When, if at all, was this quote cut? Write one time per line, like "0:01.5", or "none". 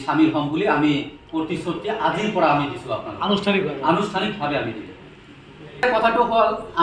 0:05.8